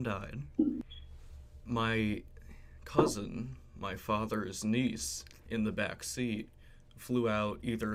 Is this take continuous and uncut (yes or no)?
yes